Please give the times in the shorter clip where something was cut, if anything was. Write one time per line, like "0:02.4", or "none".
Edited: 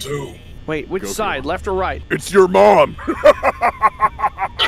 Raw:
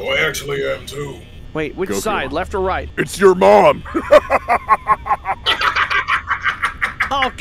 none